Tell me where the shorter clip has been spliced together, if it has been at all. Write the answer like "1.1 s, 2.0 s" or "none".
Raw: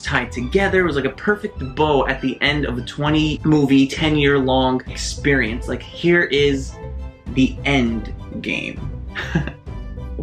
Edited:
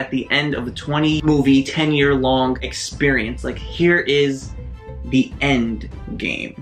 1.2 s